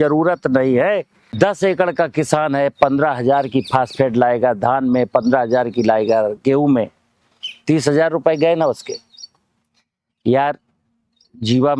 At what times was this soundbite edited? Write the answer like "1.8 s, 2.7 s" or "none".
1.2 s